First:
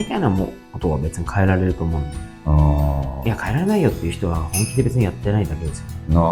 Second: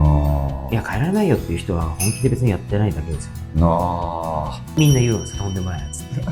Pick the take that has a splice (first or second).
second